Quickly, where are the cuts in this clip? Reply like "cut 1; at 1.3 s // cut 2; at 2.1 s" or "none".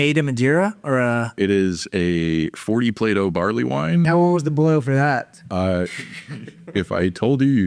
cut 1; at 1.3 s // cut 2; at 4.1 s